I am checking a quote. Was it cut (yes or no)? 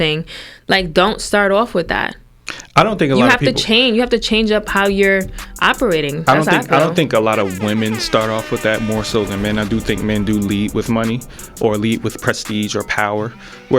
no